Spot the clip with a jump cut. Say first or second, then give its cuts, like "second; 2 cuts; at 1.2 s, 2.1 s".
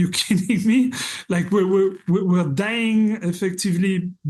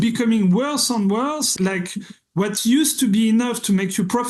second; 1 cut; at 1.5 s